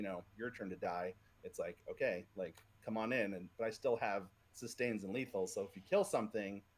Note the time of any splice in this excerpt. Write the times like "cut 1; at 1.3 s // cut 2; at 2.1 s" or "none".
none

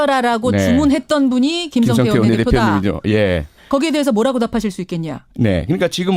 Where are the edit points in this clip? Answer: none

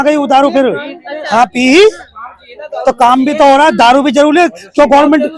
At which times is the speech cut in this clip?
none

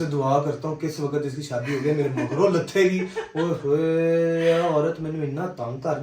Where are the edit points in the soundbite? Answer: none

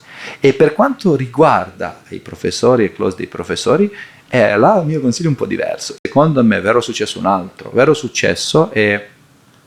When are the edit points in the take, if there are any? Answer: cut 1; at 5.9 s

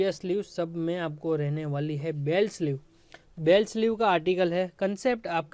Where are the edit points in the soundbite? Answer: none

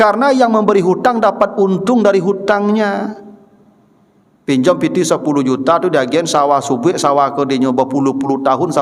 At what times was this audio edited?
none

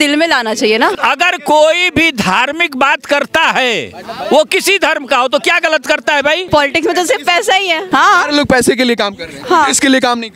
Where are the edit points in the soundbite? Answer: cut 1; at 1.0 s // cut 2; at 6.5 s // cut 3; at 7.8 s

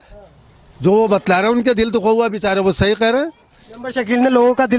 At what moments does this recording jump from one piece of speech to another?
none

